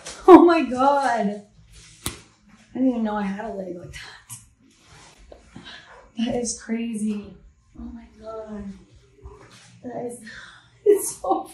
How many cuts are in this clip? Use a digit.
1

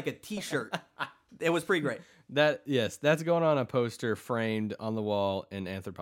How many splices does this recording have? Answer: 0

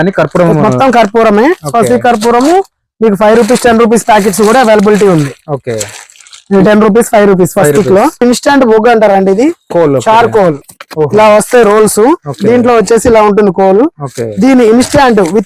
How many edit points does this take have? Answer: 1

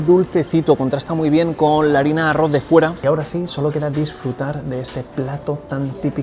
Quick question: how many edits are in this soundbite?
1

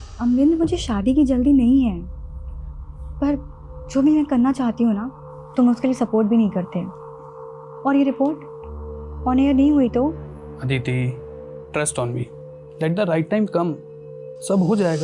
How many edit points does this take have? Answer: 0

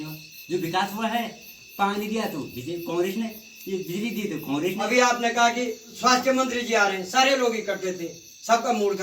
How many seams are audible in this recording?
1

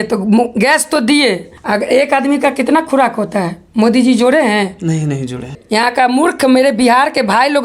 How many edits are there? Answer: 2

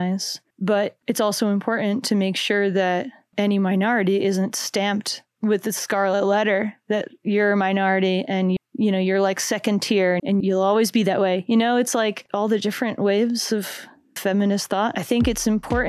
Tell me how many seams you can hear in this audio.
3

